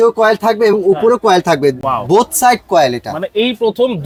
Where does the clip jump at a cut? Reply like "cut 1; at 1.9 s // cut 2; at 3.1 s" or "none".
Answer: none

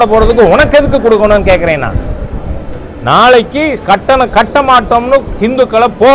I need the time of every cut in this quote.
none

